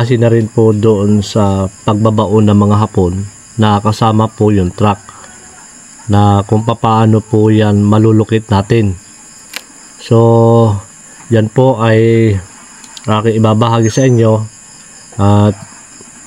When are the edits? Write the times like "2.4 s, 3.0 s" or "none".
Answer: none

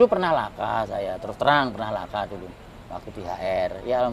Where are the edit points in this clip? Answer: none

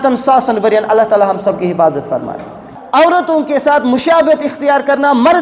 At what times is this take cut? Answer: 2.8 s

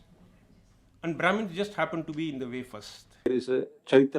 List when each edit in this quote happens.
3.3 s

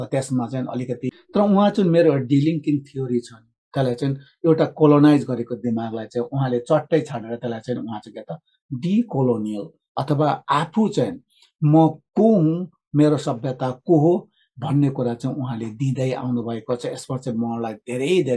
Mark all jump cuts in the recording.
1.1 s

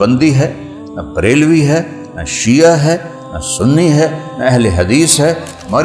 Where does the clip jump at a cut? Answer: none

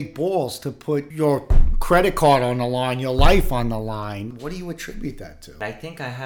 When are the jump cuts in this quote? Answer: 1.1 s, 4.3 s, 5.6 s

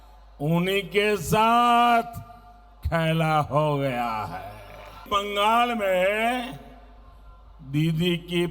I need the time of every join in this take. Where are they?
5.0 s

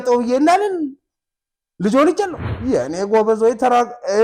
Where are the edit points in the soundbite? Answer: 2.5 s

